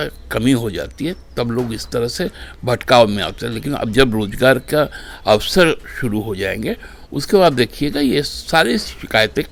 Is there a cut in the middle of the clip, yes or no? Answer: no